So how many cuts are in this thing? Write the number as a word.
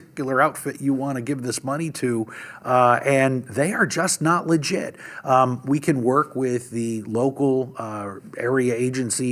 zero